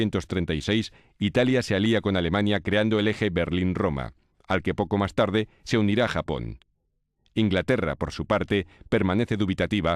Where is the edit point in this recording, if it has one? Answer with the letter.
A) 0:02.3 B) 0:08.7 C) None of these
A